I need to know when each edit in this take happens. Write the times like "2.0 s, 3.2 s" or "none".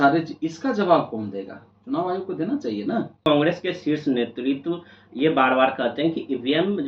3.2 s